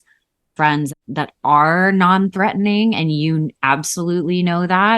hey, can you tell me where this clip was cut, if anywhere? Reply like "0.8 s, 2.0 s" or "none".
0.9 s